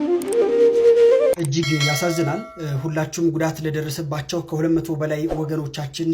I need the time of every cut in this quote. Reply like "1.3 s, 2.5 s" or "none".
1.3 s